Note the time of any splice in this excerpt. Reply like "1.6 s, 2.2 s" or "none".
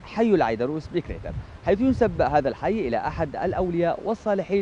none

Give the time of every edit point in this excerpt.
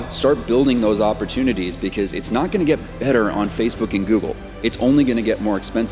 none

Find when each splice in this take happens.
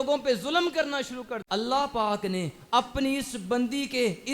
1.4 s

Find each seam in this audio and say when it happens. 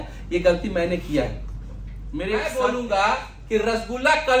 2.3 s

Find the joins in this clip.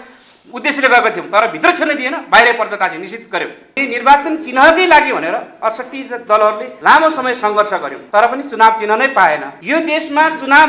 3.8 s, 6.7 s, 8.0 s, 9.5 s

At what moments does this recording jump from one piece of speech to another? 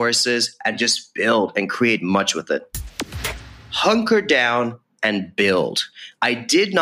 3.2 s

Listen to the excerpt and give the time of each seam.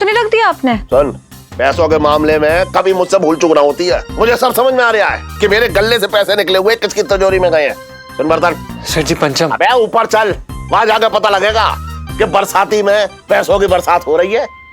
4.1 s

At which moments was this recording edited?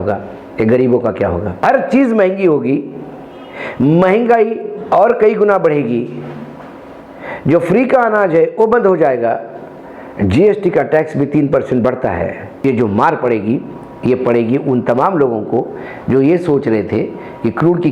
1.6 s, 12.6 s

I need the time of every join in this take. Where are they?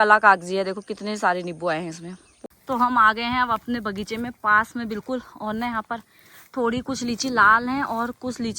2.4 s

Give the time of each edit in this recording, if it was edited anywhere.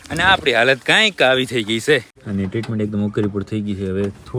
2.2 s

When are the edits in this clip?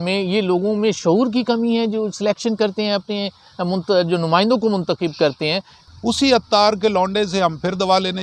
5.8 s

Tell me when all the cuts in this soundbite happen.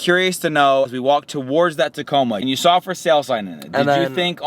2.4 s

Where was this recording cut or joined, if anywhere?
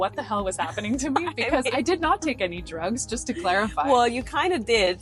none

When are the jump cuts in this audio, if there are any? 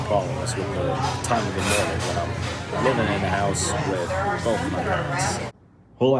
none

